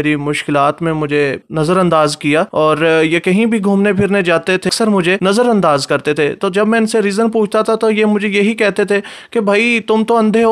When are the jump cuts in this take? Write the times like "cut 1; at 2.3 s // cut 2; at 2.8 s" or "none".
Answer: cut 1; at 1.4 s // cut 2; at 2.5 s // cut 3; at 4.8 s